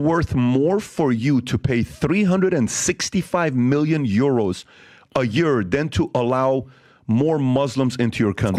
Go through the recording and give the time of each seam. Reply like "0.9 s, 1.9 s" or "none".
none